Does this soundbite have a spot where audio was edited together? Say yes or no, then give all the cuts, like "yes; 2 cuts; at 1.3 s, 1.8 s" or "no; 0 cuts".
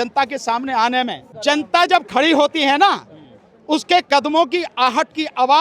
yes; 1 cut; at 1.3 s